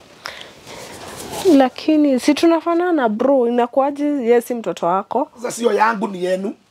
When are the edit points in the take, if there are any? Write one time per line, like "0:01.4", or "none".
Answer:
0:05.4